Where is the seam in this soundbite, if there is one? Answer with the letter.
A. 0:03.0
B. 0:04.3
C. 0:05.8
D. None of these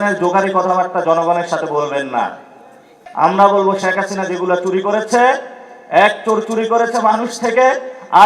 A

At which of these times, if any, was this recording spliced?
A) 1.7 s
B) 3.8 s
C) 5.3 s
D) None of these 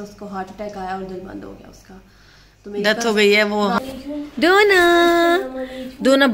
B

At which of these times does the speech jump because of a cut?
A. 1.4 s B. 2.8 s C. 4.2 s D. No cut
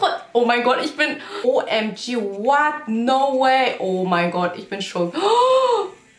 A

